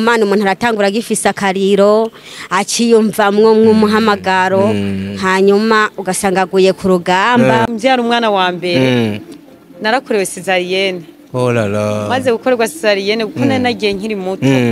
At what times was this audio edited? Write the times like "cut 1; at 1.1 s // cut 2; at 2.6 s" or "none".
cut 1; at 7.6 s